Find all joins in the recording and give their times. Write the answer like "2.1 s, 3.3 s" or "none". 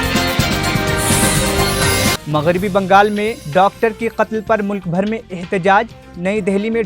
2.2 s